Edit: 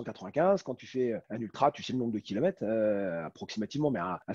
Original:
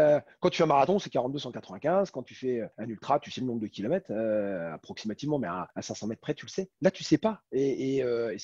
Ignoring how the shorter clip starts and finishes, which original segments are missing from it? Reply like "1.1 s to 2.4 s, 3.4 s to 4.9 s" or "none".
none